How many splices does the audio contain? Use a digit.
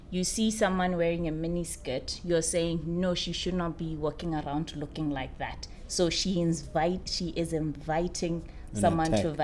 0